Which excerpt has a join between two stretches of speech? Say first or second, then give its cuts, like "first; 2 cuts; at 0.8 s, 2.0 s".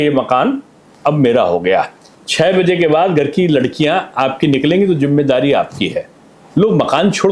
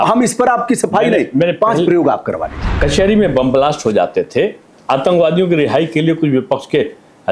second; 1 cut; at 2.7 s